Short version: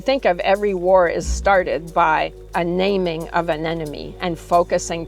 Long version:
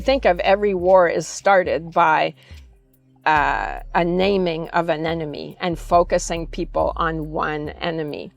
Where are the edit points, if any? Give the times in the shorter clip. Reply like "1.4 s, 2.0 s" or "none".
2.4 s